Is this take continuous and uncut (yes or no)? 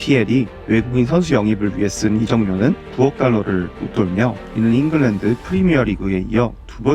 yes